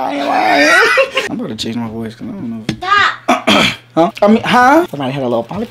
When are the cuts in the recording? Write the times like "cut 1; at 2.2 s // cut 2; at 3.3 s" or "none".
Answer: cut 1; at 1.2 s // cut 2; at 4.9 s

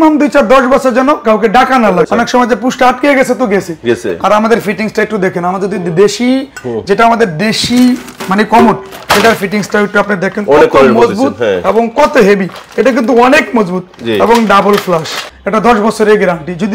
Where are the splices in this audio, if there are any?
cut 1; at 2.1 s // cut 2; at 15.2 s

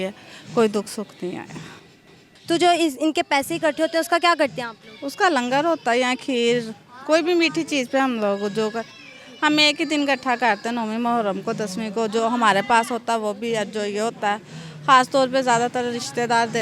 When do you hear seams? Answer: none

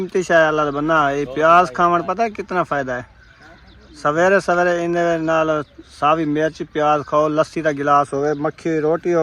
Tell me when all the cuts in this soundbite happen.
none

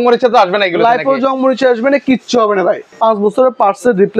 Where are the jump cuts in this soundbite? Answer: cut 1; at 2.9 s

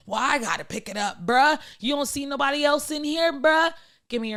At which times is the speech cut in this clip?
none

